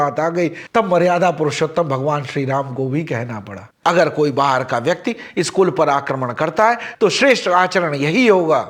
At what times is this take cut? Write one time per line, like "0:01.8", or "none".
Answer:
0:03.6